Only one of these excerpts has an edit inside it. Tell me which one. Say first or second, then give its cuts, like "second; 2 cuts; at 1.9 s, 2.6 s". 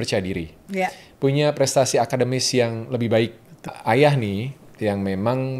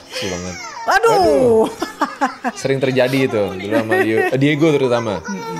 first; 1 cut; at 3.7 s